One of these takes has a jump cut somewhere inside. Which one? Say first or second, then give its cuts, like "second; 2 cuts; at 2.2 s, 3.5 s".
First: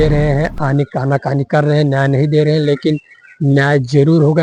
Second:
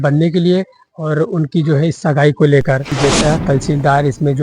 second; 1 cut; at 2.9 s